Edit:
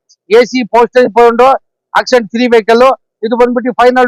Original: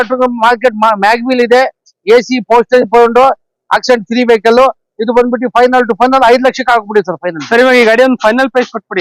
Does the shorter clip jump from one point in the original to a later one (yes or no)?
no